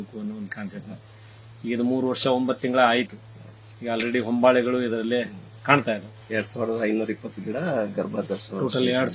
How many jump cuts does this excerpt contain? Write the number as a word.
one